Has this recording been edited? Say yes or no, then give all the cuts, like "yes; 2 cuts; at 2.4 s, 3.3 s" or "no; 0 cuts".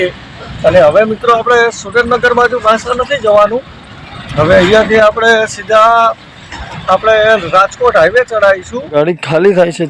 yes; 1 cut; at 8.9 s